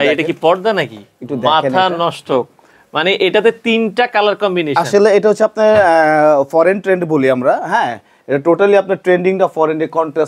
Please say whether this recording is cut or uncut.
uncut